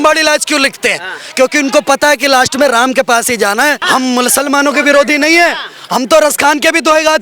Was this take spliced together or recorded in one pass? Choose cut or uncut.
cut